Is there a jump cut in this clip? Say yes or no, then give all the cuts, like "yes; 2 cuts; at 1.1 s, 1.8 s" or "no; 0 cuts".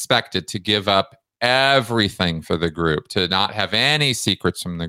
no; 0 cuts